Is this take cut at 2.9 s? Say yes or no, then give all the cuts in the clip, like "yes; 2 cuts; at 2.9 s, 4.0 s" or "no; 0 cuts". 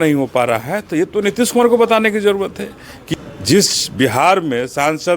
yes; 1 cut; at 2.9 s